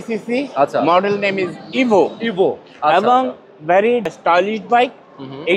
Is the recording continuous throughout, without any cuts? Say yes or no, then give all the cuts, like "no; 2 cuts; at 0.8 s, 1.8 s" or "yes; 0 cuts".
no; 1 cut; at 4.1 s